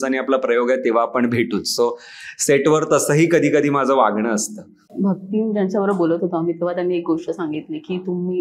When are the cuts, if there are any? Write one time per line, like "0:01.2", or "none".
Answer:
none